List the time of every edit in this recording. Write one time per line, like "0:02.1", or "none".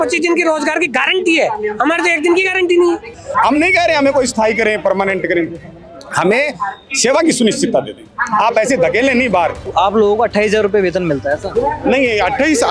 0:03.2
0:09.6